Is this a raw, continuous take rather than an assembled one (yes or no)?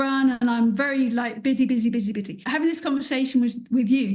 no